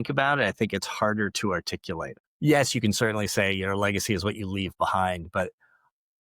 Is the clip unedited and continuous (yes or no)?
no